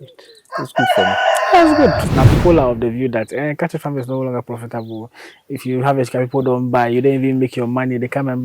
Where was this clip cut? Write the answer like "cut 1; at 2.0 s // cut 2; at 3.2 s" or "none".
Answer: cut 1; at 2.1 s